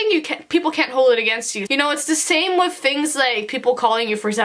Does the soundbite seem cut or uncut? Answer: cut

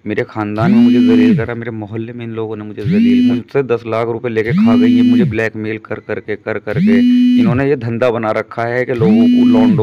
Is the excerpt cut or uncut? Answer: cut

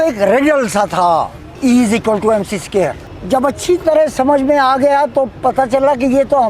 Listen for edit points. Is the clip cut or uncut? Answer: cut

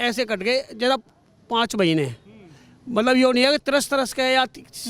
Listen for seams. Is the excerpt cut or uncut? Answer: uncut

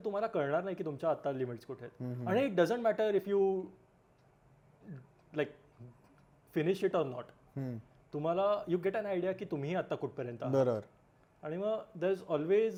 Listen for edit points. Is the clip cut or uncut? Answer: uncut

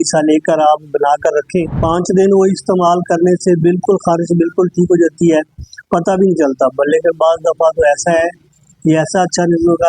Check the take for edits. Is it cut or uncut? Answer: cut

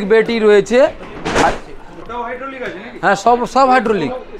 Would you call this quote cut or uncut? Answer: uncut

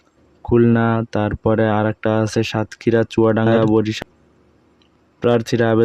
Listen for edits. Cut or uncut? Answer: cut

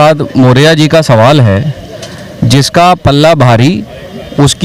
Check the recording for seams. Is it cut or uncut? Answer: uncut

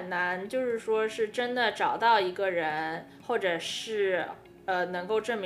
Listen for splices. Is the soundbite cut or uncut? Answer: uncut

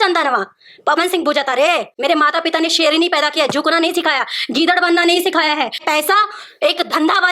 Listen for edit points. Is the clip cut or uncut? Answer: cut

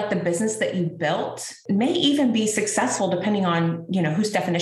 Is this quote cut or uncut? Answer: cut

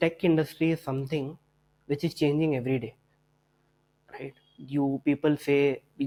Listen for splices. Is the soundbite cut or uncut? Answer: uncut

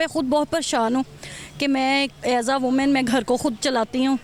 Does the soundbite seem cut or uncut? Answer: uncut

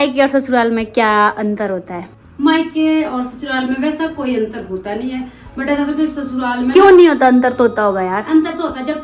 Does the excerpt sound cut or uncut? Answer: uncut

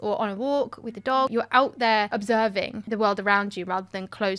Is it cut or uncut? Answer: cut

